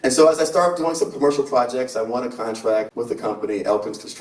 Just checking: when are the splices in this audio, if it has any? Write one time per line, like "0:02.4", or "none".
0:02.9